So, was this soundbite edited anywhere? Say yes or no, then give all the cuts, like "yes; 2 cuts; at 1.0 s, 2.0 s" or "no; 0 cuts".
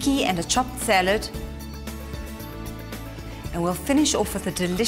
yes; 2 cuts; at 1.2 s, 3.5 s